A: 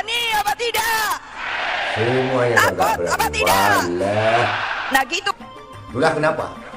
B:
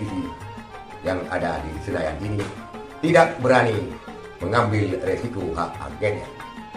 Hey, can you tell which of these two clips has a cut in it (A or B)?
A